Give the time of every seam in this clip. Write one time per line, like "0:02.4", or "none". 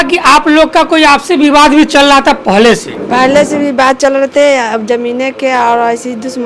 none